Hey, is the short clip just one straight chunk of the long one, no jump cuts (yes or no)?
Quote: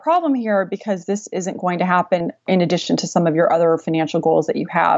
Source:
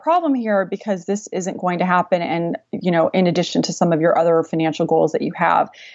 no